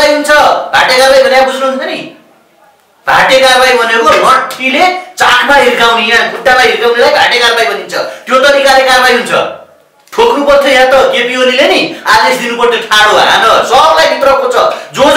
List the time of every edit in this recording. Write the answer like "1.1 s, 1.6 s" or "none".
none

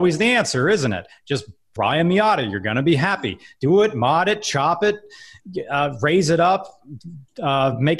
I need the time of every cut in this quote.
1.7 s

